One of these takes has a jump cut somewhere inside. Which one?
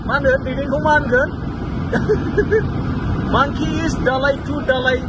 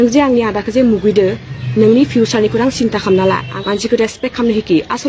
second; 1 cut; at 3.5 s

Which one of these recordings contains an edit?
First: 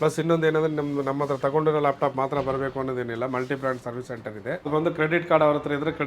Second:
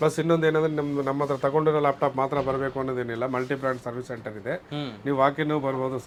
first; 1 cut; at 4.7 s

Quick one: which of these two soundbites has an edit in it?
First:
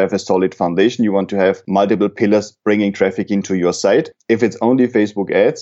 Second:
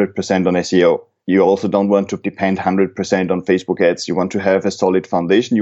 second; 1 cut; at 2.2 s

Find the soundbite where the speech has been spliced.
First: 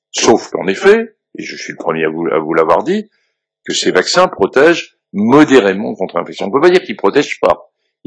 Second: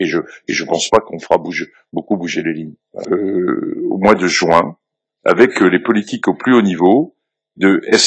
second; 1 cut; at 3.1 s

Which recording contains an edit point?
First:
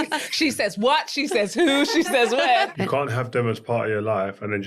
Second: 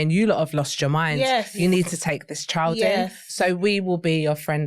first; 1 cut; at 2.7 s

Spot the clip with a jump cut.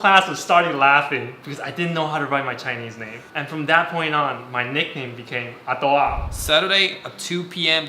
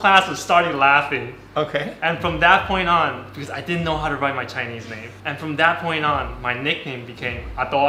first; 2 cuts; at 1.4 s, 6.2 s

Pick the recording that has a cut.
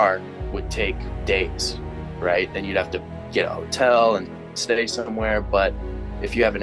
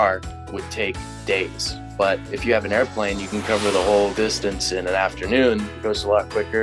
second; 3 cuts; at 2.0 s, 4.1 s, 5.7 s

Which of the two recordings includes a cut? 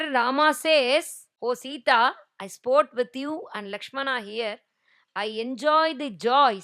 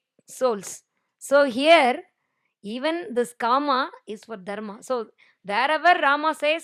first; 1 cut; at 1.2 s

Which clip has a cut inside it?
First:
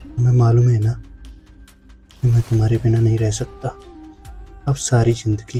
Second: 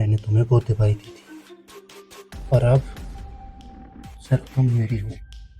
second; 2 cuts; at 2.9 s, 4.3 s

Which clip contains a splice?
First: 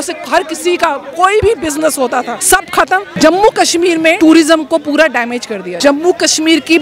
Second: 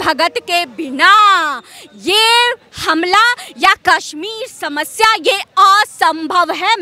first; 4 cuts; at 1.4 s, 2.6 s, 4.2 s, 5.7 s

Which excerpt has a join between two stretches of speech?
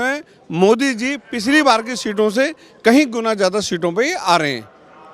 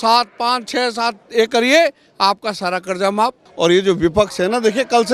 second; 1 cut; at 3.4 s

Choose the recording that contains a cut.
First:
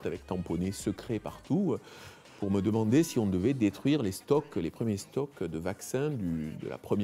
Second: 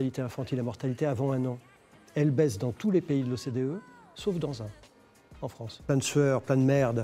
second; 1 cut; at 5.8 s

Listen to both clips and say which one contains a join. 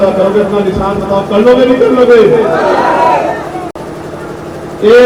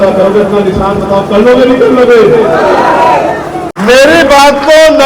second; 1 cut; at 3.7 s

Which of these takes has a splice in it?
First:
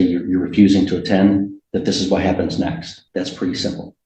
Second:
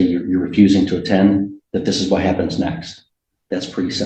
first; 1 cut; at 2.9 s

